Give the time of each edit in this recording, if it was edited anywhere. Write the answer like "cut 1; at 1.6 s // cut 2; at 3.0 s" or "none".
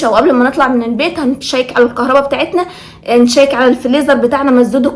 none

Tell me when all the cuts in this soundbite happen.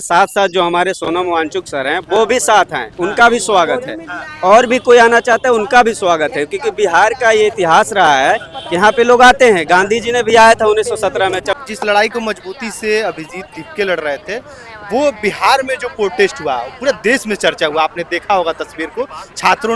cut 1; at 11.6 s

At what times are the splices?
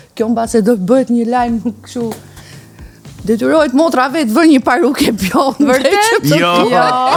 none

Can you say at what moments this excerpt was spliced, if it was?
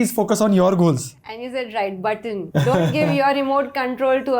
none

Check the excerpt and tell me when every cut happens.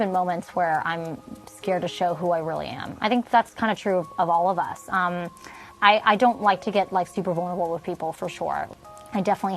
none

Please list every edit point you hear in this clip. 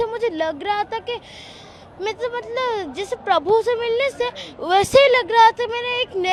none

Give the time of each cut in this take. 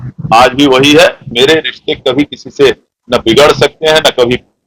cut 1; at 1.3 s

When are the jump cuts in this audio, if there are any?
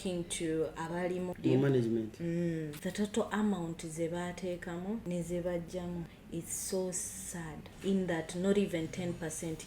cut 1; at 1.3 s // cut 2; at 2.8 s // cut 3; at 5.0 s // cut 4; at 6.2 s // cut 5; at 7.6 s

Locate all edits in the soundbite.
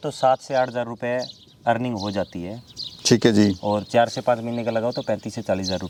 none

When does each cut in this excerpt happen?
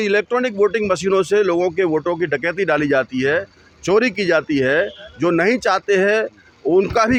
none

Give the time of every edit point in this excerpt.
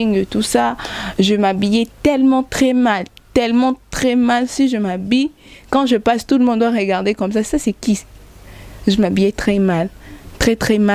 none

